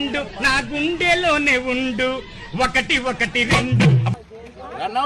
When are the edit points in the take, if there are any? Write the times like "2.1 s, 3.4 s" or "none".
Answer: 4.1 s